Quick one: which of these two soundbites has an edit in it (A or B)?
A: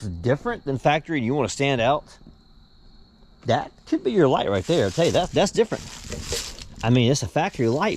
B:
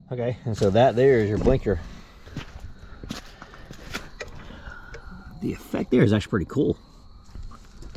B